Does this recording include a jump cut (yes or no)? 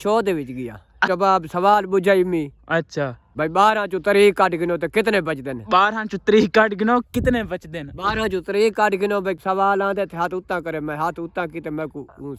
yes